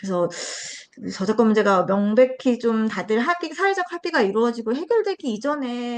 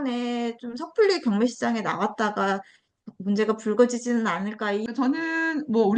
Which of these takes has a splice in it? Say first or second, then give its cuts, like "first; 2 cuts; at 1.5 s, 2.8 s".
second; 1 cut; at 4.8 s